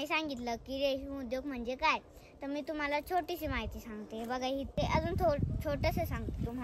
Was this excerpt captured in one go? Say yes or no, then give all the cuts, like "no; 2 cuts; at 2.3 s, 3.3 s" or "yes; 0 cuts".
no; 1 cut; at 4.7 s